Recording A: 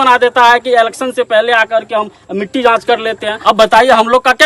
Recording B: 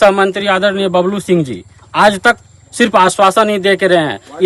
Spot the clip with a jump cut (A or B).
A